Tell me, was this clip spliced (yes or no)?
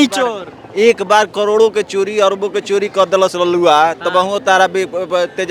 no